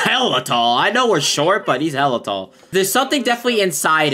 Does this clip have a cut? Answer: yes; 1 cut; at 2.5 s

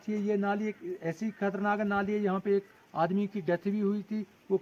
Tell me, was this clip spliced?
no; 0 cuts

